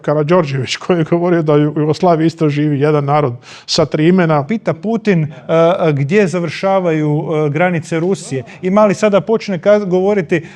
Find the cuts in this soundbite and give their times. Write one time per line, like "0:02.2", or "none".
0:04.5